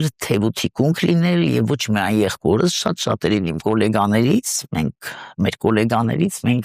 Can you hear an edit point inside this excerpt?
no; 0 cuts

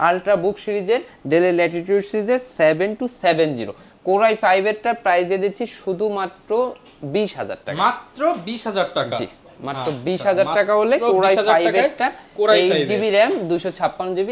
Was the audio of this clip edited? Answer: no; 0 cuts

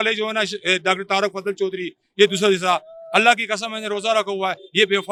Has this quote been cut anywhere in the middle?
no; 0 cuts

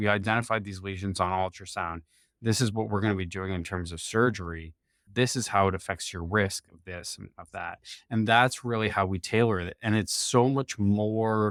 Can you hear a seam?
no; 0 cuts

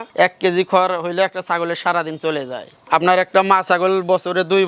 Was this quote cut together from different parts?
yes; 1 cut; at 2.8 s

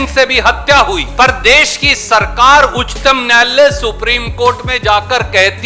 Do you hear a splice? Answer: no; 0 cuts

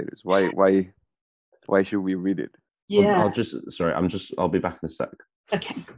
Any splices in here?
no; 0 cuts

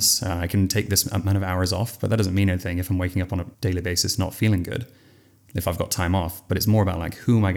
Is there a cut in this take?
yes; 1 cut; at 3.5 s

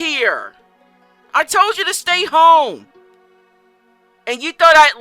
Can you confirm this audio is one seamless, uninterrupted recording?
yes; 0 cuts

